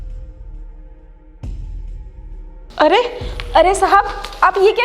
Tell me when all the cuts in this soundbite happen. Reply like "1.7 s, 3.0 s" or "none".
2.7 s